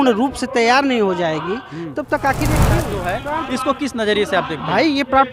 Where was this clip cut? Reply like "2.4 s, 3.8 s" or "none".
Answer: 2.7 s